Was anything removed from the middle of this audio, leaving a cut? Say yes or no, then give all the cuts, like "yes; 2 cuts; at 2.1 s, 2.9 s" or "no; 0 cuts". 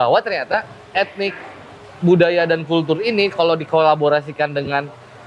no; 0 cuts